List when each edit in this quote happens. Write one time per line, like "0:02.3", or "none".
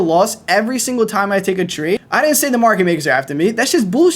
0:02.1